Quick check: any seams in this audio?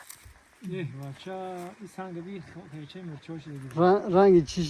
no; 0 cuts

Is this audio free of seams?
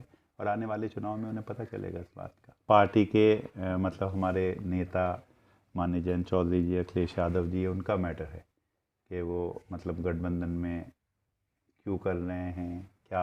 no; 1 cut; at 2.6 s

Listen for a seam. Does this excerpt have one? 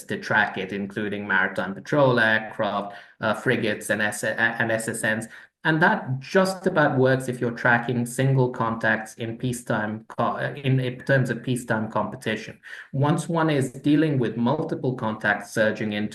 no; 0 cuts

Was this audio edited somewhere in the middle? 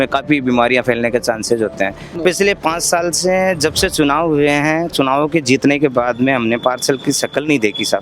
yes; 1 cut; at 2.0 s

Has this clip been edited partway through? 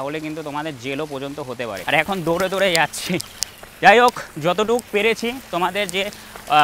yes; 1 cut; at 1.8 s

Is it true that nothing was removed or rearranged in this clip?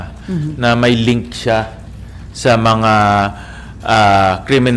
yes; 0 cuts

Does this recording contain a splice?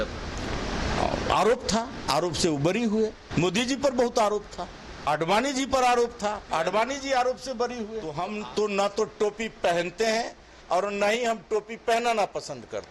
yes; 3 cuts; at 3.2 s, 5.1 s, 8.1 s

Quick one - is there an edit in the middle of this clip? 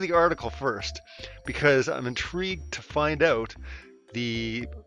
yes; 1 cut; at 1.4 s

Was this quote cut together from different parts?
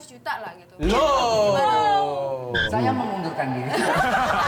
no; 0 cuts

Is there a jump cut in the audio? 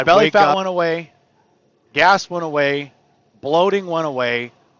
no; 0 cuts

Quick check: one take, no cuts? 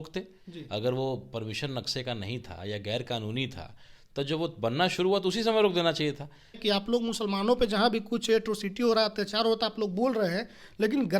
no; 1 cut; at 6.6 s

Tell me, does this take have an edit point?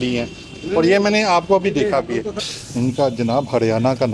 yes; 1 cut; at 2.4 s

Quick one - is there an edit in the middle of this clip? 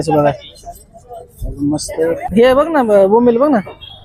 yes; 1 cut; at 2.3 s

